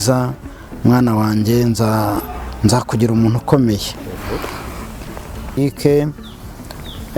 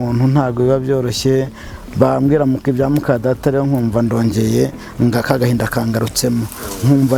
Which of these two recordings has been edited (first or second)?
first